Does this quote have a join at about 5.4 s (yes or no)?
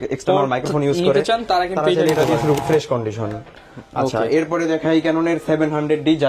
no